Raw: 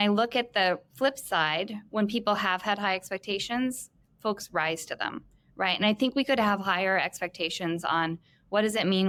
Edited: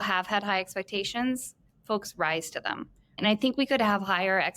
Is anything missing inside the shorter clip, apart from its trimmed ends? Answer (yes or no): yes